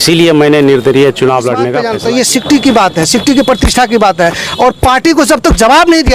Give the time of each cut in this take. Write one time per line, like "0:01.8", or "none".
0:01.8